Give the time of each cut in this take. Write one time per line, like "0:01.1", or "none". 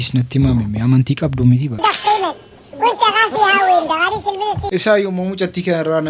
0:01.8